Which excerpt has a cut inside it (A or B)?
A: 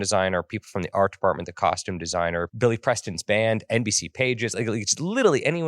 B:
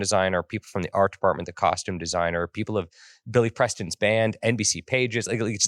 A